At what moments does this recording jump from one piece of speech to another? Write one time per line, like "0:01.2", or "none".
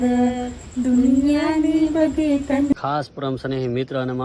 0:02.7